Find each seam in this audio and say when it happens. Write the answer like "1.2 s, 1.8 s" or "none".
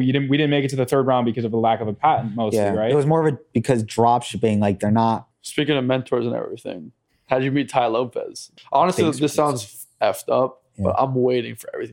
5.4 s, 8.4 s